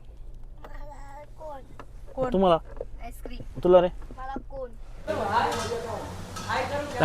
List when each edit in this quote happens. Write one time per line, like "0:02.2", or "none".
0:04.9